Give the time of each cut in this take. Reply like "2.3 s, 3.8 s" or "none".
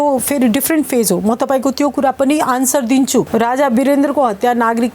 3.3 s